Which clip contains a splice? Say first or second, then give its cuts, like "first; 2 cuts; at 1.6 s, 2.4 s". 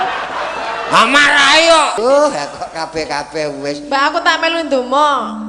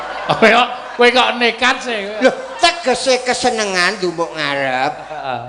first; 1 cut; at 2.0 s